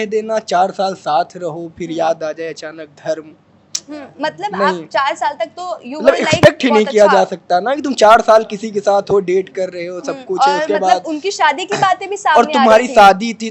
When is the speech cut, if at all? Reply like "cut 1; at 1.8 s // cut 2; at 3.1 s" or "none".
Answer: none